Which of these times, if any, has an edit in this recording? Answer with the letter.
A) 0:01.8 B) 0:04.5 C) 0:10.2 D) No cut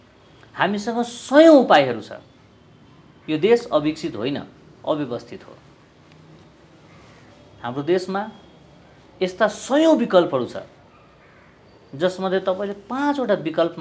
D